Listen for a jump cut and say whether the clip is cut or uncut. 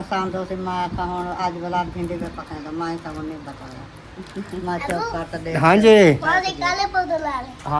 uncut